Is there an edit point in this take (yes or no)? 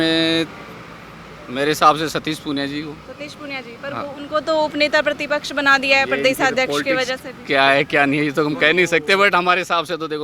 no